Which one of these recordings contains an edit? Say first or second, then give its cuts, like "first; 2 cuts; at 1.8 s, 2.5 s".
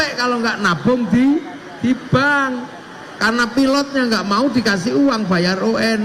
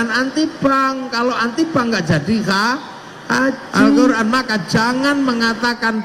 second; 1 cut; at 4.2 s